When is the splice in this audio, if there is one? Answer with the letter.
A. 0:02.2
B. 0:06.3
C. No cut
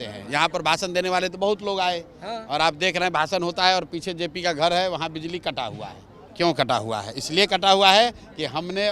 B